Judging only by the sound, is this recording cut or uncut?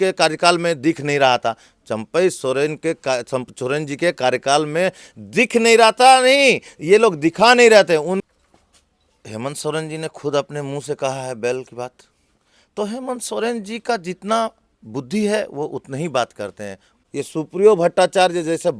cut